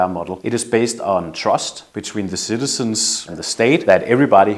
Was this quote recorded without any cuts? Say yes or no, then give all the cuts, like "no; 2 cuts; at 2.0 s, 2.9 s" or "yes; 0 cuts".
no; 1 cut; at 1.9 s